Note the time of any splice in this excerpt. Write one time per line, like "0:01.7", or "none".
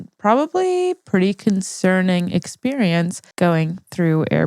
0:03.2